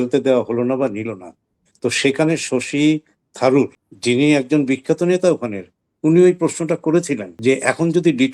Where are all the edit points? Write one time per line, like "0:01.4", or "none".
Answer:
0:03.9
0:07.2